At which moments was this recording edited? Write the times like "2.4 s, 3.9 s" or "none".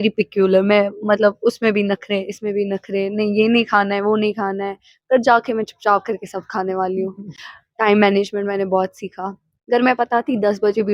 none